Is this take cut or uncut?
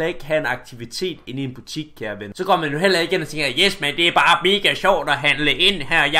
cut